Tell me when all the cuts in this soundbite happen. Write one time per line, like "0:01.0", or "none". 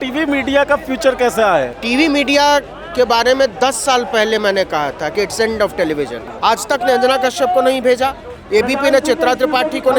0:01.8
0:06.2

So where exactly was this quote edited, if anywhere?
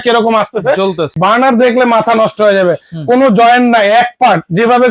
0:01.1

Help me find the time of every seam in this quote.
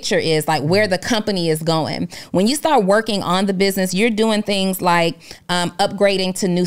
none

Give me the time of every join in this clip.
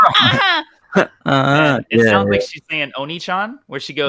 none

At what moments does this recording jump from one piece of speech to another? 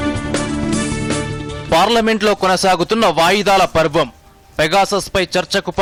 none

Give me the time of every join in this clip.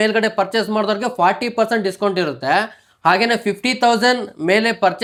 none

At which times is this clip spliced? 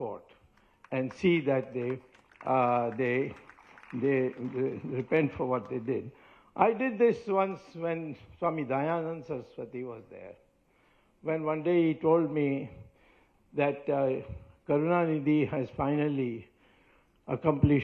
none

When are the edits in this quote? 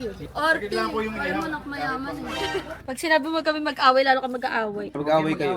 0:02.8

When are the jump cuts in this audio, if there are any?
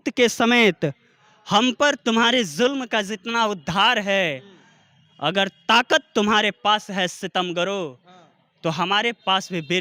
none

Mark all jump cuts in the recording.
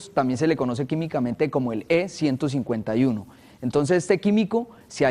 0:02.5

